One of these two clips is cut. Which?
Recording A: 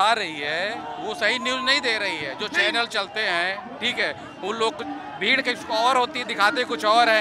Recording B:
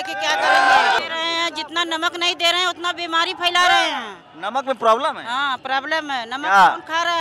B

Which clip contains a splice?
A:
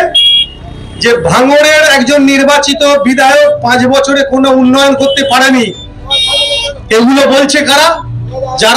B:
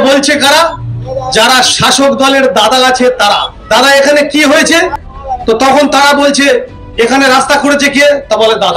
B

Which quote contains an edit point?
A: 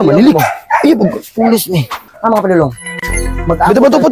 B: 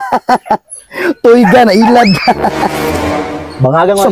A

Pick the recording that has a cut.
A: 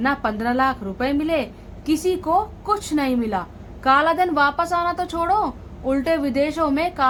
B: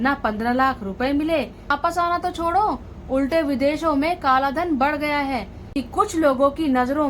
B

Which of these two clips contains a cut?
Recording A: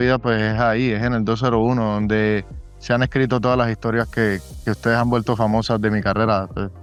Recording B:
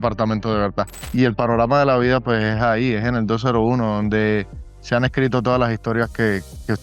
B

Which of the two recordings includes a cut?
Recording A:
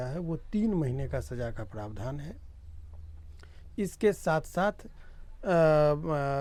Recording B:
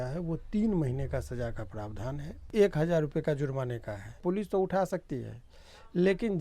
B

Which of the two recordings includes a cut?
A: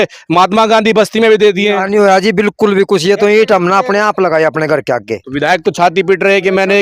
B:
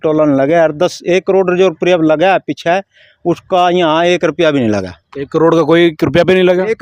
A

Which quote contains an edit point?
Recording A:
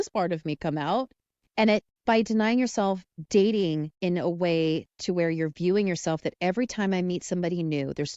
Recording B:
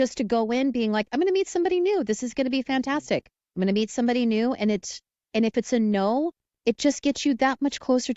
A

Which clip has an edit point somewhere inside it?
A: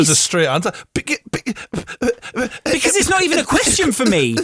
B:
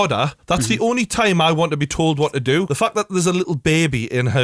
B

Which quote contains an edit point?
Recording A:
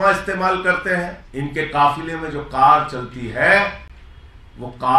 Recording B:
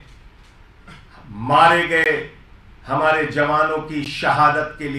A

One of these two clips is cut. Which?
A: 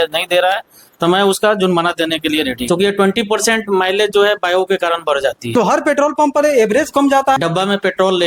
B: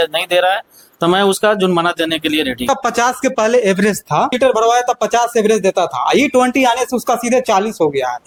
A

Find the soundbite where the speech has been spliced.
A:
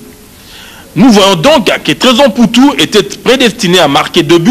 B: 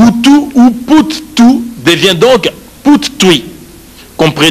A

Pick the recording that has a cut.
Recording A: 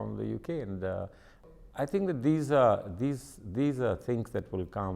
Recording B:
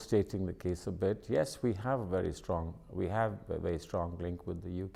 A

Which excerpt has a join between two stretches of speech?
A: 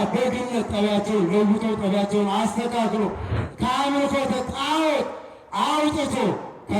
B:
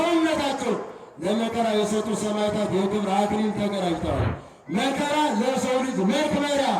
A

